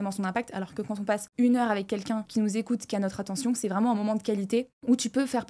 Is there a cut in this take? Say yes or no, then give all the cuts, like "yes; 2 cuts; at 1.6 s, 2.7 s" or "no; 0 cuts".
no; 0 cuts